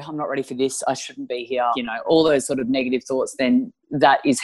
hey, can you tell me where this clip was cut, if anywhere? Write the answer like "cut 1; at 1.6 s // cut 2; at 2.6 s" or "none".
cut 1; at 1.8 s